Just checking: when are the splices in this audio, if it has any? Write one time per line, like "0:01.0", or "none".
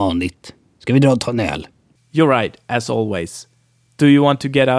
none